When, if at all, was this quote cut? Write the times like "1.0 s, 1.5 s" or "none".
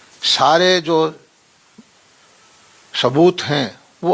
none